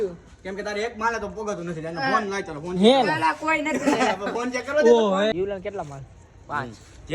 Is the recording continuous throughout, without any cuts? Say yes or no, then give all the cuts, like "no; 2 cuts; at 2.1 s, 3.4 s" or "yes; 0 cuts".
no; 1 cut; at 5.3 s